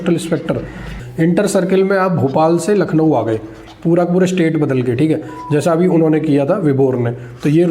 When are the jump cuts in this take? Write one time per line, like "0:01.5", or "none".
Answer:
0:01.0